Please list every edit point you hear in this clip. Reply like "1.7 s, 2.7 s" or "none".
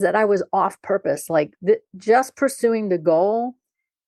none